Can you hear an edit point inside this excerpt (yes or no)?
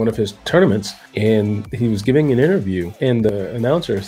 yes